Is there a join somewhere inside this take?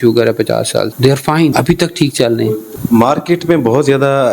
yes; 3 cuts; at 0.9 s, 1.5 s, 2.6 s

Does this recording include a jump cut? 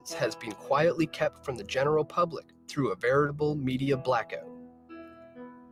no; 0 cuts

